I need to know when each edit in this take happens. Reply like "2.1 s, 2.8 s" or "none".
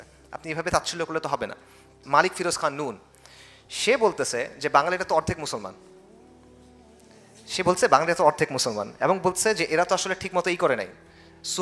2.0 s